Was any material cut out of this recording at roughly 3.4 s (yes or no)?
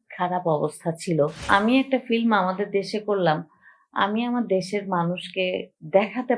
no